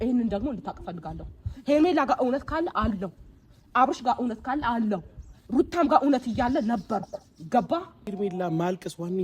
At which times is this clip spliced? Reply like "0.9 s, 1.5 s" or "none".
8.1 s